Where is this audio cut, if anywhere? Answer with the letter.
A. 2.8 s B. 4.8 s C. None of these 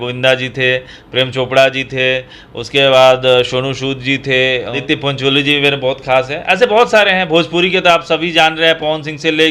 B